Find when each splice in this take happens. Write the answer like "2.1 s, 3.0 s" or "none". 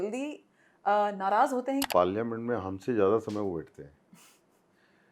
1.9 s